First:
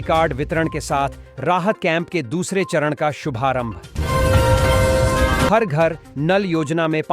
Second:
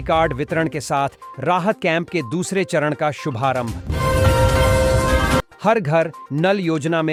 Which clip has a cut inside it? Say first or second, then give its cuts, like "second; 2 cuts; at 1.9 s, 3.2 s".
first; 2 cuts; at 3.9 s, 5.5 s